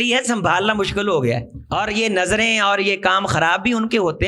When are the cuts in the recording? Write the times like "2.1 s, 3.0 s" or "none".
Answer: 1.6 s

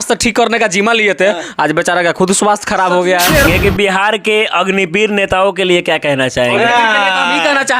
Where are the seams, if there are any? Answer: 3.5 s

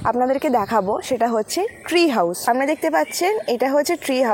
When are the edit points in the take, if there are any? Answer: 2.4 s

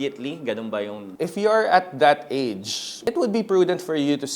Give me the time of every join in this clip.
1.0 s, 3.0 s

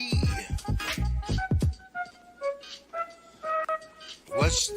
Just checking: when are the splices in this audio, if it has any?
none

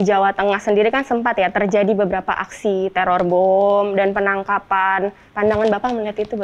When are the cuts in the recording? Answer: 5.2 s

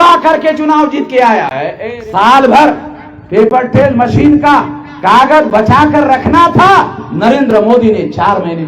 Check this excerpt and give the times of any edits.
1.8 s

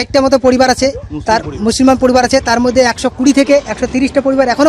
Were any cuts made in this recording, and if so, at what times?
none

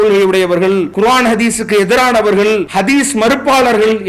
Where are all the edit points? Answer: 0.9 s, 2.7 s

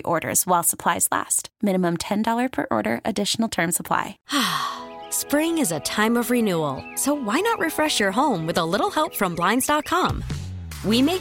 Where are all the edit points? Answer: 4.1 s

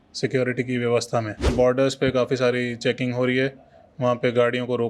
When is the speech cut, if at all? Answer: 1.4 s

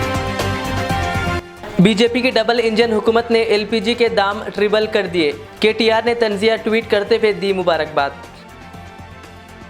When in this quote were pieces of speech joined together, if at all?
1.4 s

